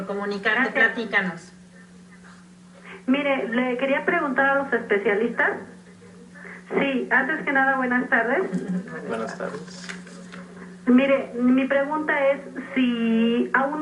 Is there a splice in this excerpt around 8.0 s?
yes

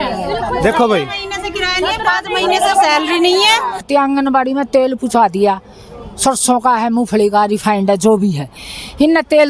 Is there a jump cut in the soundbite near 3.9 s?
yes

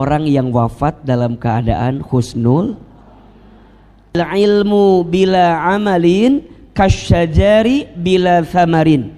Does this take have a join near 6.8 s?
no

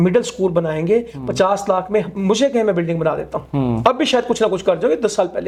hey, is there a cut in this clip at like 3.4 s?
no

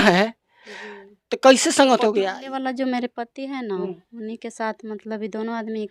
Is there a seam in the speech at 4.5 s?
no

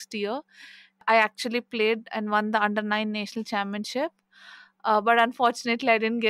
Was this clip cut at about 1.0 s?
yes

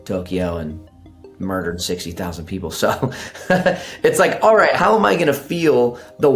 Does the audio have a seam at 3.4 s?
no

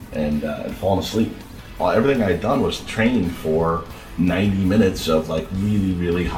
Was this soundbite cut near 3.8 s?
no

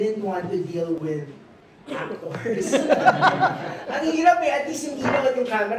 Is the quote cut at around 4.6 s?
no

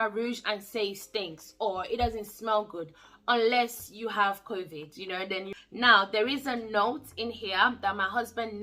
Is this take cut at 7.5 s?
no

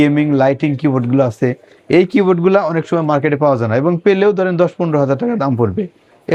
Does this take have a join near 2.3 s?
no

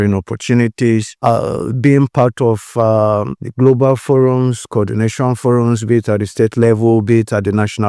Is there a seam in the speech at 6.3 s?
no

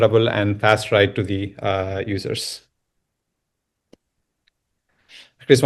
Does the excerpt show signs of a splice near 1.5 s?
no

